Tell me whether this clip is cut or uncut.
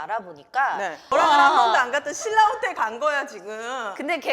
cut